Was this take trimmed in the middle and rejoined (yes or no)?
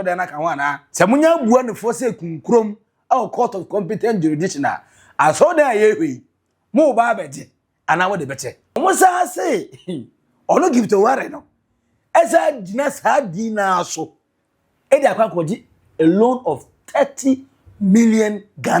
yes